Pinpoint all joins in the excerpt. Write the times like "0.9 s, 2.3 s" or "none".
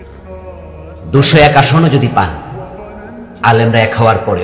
none